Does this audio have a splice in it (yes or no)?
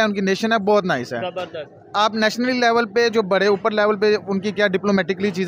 no